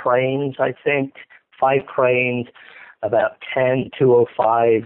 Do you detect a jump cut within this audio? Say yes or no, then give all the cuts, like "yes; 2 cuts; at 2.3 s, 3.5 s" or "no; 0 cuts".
no; 0 cuts